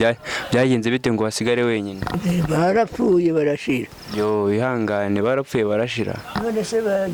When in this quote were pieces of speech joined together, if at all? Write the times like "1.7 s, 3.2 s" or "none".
none